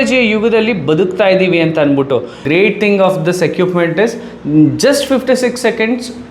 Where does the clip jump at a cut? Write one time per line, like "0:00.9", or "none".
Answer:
0:02.4

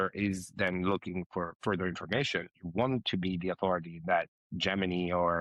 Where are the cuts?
0:04.3

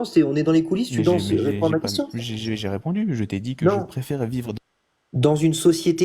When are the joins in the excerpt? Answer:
none

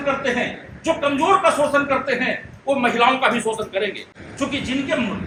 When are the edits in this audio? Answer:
none

